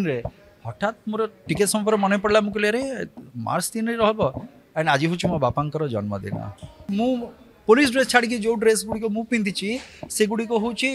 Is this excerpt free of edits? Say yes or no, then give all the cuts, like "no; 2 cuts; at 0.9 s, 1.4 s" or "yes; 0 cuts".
no; 1 cut; at 6.8 s